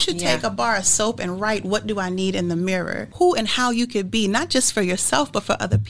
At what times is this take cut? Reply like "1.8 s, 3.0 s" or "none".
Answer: 3.0 s